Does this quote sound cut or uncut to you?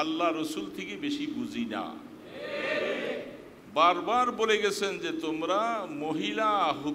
uncut